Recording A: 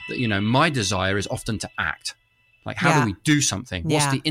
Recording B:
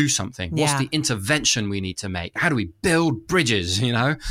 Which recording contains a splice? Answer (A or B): B